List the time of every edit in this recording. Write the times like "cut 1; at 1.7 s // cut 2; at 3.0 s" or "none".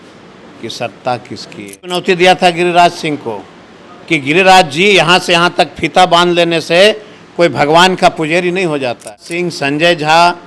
cut 1; at 2.0 s // cut 2; at 9.3 s